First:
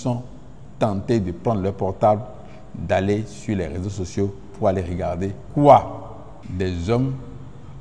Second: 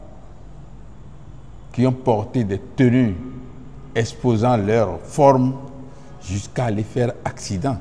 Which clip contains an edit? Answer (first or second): first